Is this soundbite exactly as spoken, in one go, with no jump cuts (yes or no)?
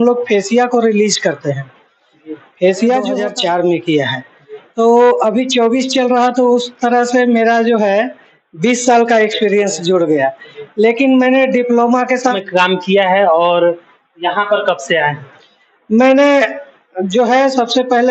no